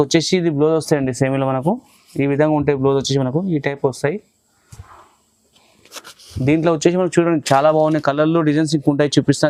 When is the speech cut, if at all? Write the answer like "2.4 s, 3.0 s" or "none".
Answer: none